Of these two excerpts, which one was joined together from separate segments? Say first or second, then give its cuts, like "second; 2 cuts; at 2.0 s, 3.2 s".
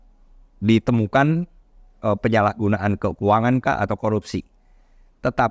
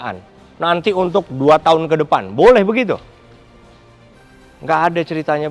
second; 1 cut; at 4.2 s